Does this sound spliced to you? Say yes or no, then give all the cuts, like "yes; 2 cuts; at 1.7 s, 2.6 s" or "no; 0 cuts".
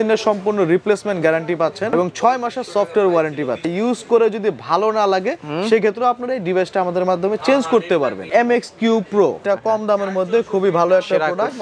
yes; 4 cuts; at 1.9 s, 3.7 s, 8.2 s, 9.4 s